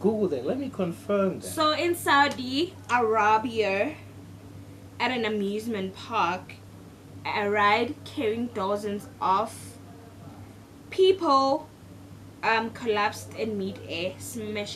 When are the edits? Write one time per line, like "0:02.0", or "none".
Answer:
none